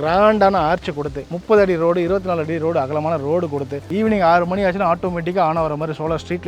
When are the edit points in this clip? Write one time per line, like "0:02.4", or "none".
0:01.3
0:03.8